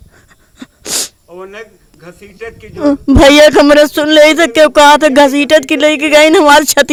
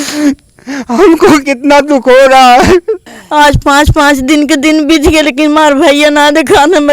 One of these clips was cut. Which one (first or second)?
second